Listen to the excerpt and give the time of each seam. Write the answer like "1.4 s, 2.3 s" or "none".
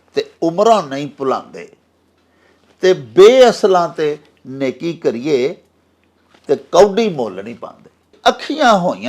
8.1 s